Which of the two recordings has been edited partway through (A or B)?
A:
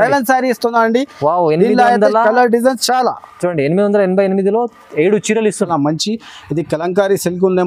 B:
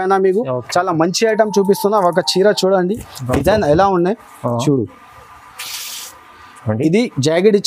A